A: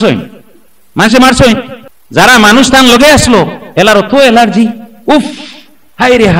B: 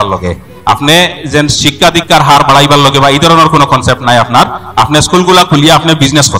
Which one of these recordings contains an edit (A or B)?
A